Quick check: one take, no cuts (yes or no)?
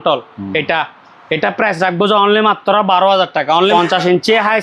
no